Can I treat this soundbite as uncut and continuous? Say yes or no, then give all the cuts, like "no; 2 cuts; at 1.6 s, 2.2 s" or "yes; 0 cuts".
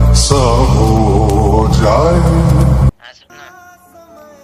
no; 1 cut; at 2.9 s